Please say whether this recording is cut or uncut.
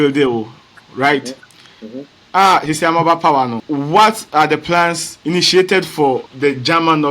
cut